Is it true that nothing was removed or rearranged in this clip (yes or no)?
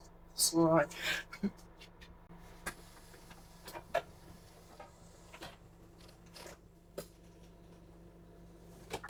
yes